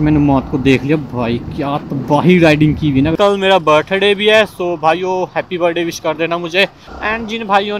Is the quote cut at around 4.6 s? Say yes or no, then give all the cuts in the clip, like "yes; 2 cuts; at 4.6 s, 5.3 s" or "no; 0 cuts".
no; 1 cut; at 3.1 s